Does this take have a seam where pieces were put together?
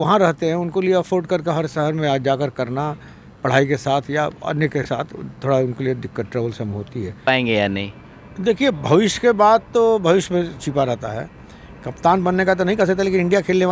yes; 1 cut; at 7.2 s

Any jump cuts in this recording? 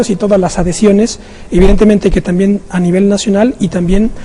yes; 1 cut; at 1.8 s

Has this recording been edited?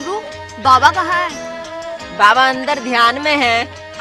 no; 0 cuts

